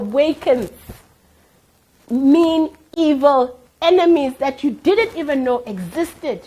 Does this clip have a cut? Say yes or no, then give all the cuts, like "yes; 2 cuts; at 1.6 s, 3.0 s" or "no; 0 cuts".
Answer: no; 0 cuts